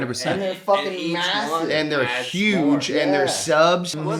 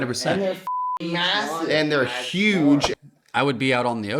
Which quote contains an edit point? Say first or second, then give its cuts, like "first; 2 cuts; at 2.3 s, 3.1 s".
second; 1 cut; at 2.9 s